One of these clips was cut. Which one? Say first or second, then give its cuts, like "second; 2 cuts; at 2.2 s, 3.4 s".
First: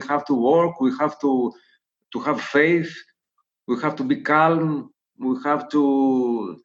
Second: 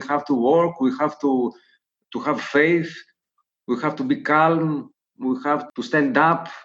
second; 1 cut; at 5.6 s